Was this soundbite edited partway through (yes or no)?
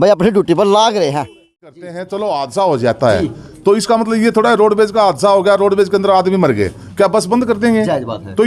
yes